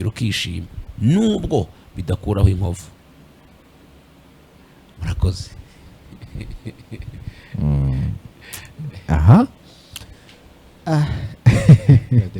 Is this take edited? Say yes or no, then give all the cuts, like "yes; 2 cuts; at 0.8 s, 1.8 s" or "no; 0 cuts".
no; 0 cuts